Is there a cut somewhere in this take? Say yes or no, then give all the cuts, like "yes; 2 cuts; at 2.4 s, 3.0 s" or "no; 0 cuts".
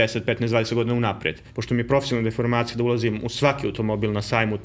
yes; 1 cut; at 1.5 s